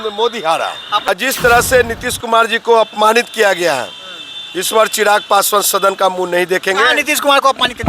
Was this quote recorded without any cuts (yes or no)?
no